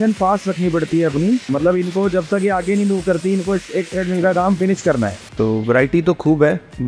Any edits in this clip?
yes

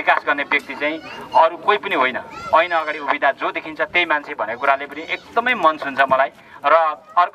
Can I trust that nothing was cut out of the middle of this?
yes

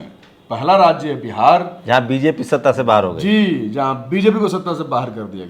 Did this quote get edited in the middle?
no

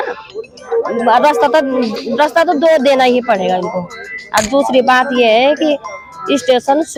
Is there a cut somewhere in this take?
no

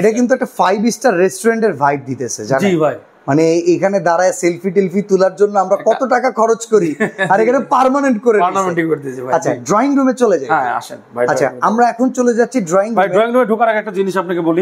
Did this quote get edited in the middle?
no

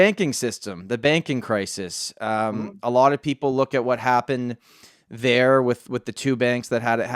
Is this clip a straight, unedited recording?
yes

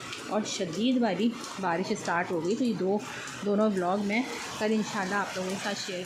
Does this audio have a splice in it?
no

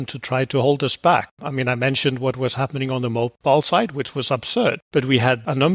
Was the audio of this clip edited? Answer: yes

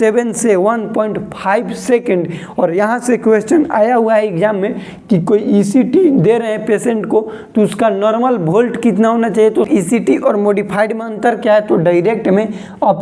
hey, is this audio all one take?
no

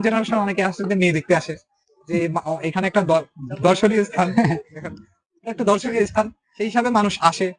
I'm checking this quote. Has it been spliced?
no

